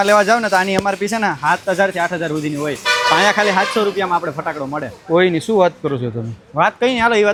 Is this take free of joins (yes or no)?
yes